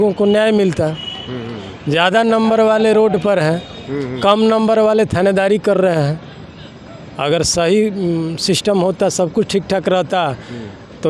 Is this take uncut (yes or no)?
yes